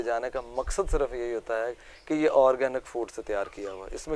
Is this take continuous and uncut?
yes; 0 cuts

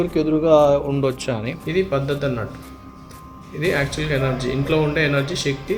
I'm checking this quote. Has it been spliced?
yes; 1 cut; at 1.6 s

